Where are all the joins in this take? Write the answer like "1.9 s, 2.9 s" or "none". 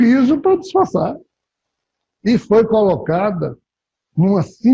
1.7 s